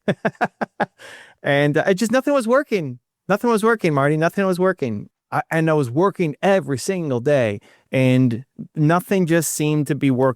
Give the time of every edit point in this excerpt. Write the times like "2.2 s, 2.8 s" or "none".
5.0 s